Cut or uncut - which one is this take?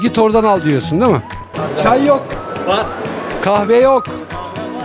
cut